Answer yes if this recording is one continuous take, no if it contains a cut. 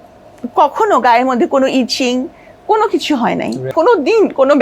no